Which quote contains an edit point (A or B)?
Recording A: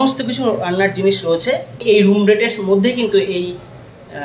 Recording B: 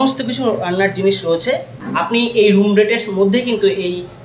A